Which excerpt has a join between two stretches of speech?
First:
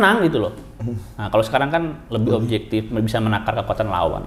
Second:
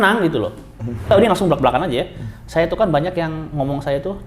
second; 1 cut; at 1.1 s

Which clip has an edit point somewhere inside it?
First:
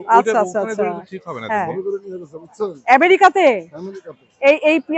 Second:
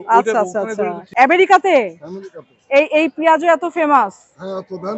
second; 1 cut; at 1.1 s

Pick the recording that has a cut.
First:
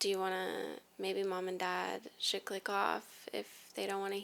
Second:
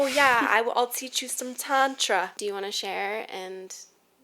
second; 1 cut; at 2.3 s

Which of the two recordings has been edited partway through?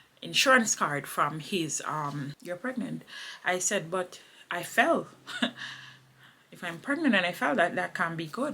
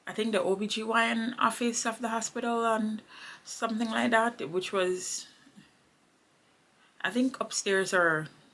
first; 1 cut; at 2.3 s

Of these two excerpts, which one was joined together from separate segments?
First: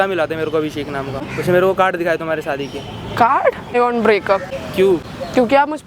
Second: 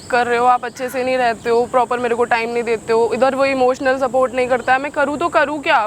first; 3 cuts; at 1.3 s, 3.7 s, 4.6 s

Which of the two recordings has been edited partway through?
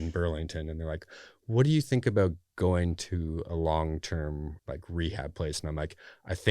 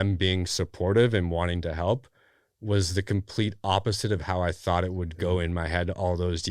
first; 1 cut; at 4.5 s

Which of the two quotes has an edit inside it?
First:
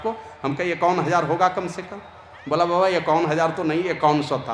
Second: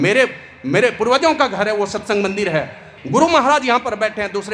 second; 1 cut; at 2.9 s

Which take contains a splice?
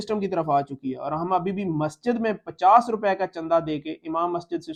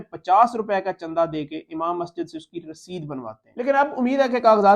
second; 1 cut; at 3.4 s

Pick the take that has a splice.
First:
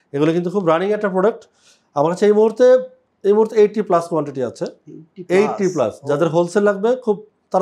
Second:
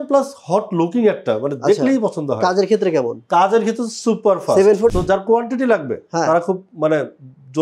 second; 1 cut; at 4.9 s

